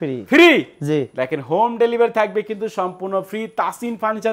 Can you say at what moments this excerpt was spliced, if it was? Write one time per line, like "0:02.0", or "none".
none